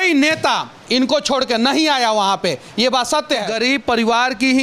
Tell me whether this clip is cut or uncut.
cut